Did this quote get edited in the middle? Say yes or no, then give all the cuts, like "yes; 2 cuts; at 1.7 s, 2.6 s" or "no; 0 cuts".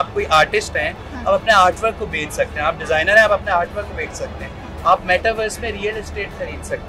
no; 0 cuts